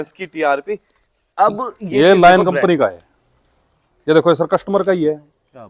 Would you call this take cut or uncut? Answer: uncut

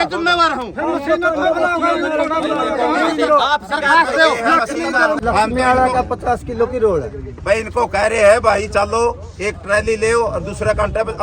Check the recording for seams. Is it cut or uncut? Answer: cut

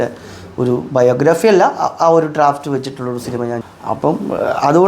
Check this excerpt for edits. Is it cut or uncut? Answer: cut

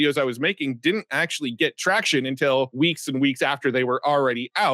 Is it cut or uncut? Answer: uncut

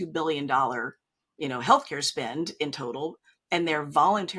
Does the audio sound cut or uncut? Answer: uncut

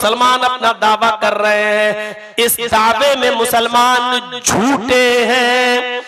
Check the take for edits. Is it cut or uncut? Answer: uncut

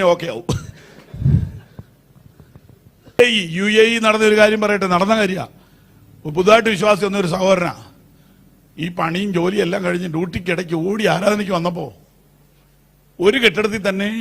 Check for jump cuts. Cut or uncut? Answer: cut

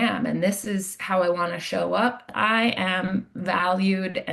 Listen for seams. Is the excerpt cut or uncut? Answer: cut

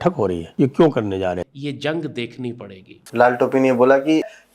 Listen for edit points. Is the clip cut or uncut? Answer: cut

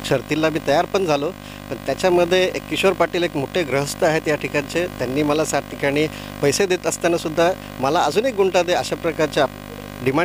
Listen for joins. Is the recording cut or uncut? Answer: uncut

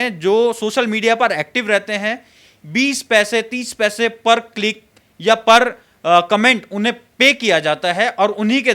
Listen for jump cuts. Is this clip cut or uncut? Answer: uncut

